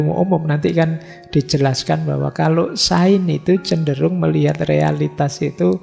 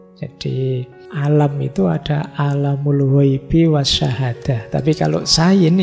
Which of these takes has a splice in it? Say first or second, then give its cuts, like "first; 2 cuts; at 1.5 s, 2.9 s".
second; 1 cut; at 1.0 s